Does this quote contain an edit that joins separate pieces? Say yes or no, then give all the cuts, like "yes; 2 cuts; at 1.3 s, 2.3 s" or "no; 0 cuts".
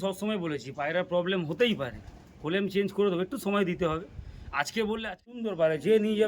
yes; 1 cut; at 5.3 s